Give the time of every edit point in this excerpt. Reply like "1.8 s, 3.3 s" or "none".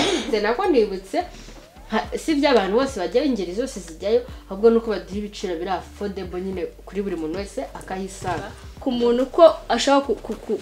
8.7 s